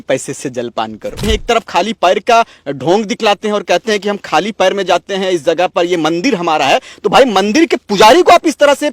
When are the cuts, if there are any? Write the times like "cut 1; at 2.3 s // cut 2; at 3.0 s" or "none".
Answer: cut 1; at 1.2 s